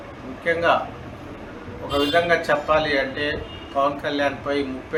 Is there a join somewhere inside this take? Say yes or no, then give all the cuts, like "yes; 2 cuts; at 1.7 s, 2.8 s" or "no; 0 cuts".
no; 0 cuts